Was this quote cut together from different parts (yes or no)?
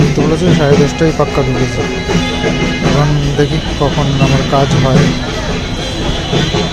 no